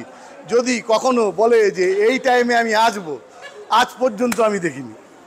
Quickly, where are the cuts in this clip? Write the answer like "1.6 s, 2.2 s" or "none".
none